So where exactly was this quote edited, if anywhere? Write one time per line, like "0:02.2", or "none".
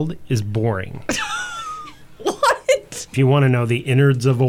0:03.0